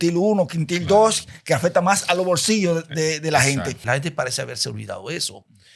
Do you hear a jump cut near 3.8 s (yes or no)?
yes